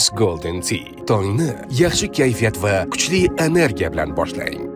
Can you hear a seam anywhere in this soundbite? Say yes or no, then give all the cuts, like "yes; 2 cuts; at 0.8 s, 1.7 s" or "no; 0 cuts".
no; 0 cuts